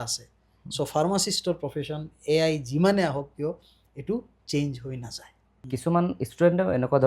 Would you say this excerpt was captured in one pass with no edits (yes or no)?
no